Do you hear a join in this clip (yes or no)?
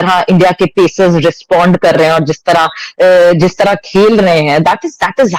no